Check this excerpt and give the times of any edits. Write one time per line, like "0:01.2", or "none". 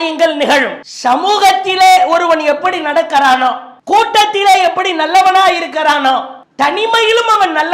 none